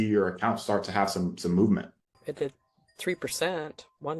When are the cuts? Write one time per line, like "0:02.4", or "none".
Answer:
0:01.9